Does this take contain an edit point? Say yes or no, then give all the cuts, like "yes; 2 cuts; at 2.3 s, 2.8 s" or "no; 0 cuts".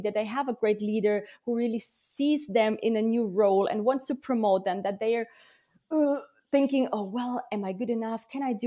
no; 0 cuts